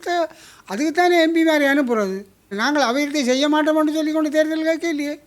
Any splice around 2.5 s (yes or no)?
yes